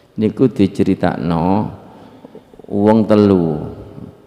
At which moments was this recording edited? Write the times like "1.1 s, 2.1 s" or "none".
none

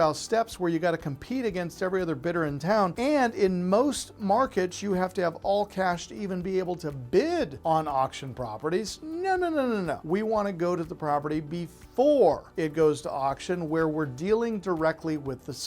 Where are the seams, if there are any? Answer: 2.9 s, 7.5 s, 10.0 s, 12.5 s

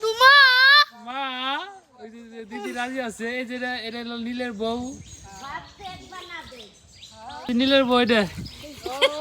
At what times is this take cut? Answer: 7.5 s

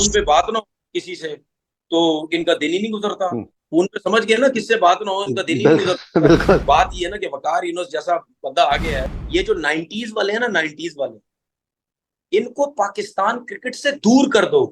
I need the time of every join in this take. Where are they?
6.6 s, 9.2 s

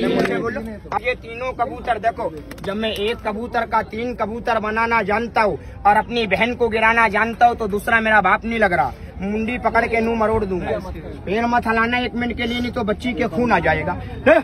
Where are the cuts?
1.0 s

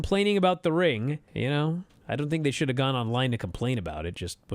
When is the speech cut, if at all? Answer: 1.3 s, 1.9 s

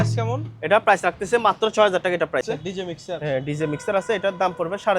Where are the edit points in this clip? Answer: 2.4 s

